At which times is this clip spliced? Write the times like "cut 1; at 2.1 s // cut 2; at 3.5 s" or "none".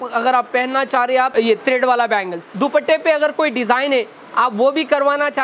cut 1; at 1.3 s // cut 2; at 2.5 s